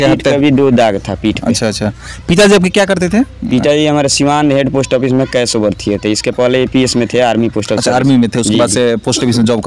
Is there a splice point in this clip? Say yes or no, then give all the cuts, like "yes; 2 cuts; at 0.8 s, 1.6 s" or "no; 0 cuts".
no; 0 cuts